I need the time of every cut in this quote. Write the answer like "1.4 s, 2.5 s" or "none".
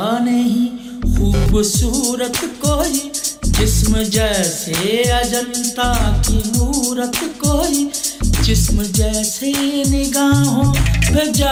none